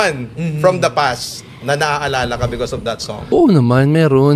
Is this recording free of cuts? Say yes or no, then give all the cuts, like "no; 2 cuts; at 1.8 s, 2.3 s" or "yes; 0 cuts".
no; 1 cut; at 3.3 s